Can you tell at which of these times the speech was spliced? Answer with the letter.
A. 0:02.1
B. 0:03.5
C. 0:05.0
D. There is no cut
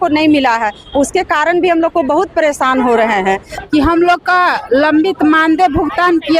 B